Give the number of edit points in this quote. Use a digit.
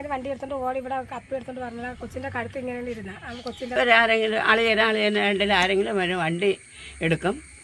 1